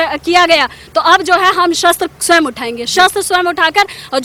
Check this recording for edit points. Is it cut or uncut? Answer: uncut